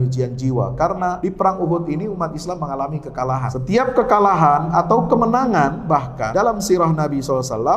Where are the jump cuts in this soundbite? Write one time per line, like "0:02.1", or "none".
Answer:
0:01.2
0:03.6
0:06.3